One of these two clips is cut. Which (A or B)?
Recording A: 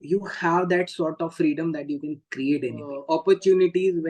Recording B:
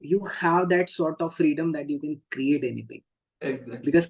A